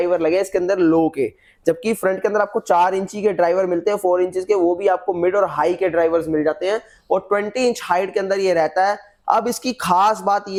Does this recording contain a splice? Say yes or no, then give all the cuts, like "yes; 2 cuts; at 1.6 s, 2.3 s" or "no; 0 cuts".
no; 0 cuts